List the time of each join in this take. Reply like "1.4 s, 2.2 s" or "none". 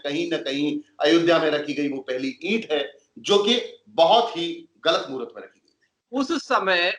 6.0 s